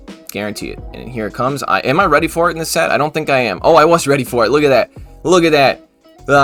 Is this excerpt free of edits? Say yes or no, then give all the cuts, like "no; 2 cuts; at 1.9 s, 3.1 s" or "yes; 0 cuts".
yes; 0 cuts